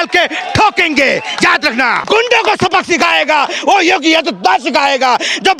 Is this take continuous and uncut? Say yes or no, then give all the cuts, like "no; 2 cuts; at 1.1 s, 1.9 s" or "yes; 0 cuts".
no; 1 cut; at 2.0 s